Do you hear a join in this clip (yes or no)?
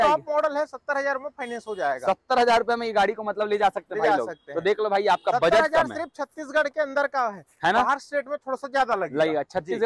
no